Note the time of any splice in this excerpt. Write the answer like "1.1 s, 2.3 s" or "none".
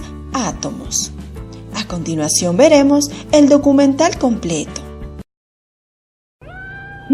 3.3 s